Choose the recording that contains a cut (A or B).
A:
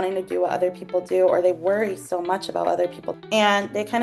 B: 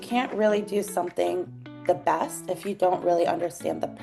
A